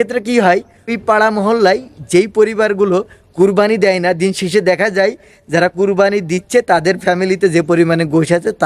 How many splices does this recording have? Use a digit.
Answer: 1